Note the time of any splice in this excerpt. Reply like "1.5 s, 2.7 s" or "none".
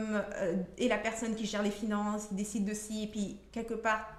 none